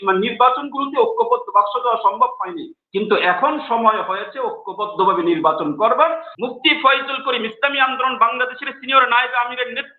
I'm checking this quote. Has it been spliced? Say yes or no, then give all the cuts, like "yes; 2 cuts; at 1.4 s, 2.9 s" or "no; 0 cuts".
yes; 1 cut; at 6.2 s